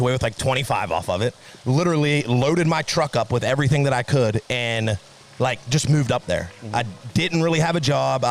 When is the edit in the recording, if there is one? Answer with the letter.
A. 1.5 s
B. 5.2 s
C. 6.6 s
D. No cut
A